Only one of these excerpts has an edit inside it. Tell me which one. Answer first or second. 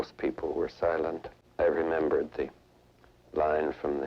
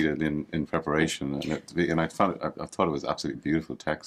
first